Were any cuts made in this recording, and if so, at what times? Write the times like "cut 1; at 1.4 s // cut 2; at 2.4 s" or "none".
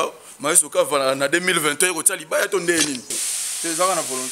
cut 1; at 3.2 s